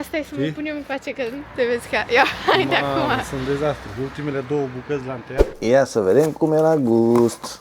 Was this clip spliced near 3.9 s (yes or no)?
no